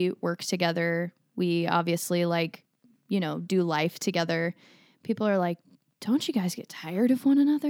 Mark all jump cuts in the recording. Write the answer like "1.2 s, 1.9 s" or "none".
none